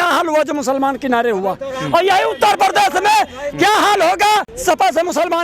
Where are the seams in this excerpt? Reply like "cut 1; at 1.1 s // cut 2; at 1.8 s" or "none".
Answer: cut 1; at 4.5 s